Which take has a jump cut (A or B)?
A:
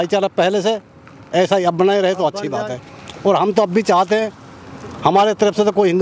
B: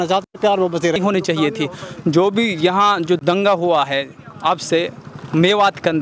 B